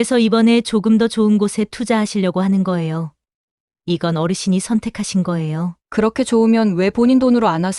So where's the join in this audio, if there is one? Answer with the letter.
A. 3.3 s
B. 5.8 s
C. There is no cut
B